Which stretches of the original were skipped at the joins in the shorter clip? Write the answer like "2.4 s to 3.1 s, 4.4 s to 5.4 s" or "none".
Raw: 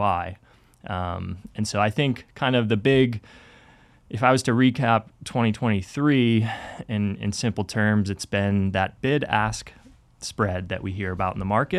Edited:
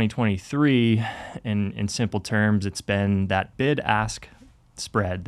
none